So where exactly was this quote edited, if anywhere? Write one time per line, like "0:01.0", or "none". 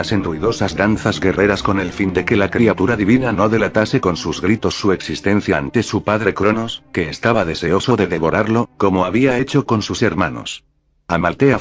none